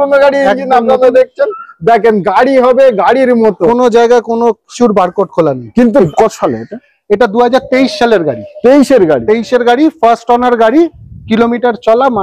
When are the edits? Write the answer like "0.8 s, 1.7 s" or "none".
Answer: 6.1 s